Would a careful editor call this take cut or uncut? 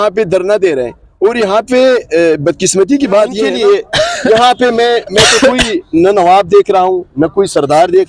cut